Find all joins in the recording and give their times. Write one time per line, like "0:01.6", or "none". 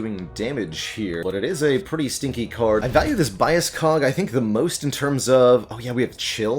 0:01.2
0:02.8